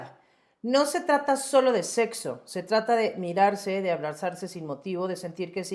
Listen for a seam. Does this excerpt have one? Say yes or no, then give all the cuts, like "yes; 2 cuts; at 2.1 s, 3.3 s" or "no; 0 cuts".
no; 0 cuts